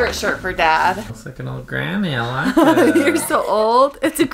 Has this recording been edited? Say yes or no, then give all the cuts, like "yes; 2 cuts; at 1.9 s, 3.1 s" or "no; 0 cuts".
yes; 1 cut; at 1.1 s